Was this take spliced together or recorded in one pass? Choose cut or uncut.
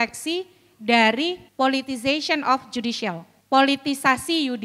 cut